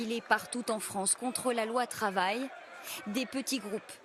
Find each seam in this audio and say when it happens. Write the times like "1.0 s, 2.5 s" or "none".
2.1 s